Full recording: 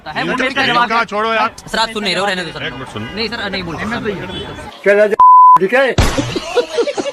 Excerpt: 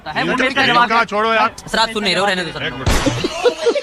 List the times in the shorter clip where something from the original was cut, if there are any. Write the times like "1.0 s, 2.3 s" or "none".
2.9 s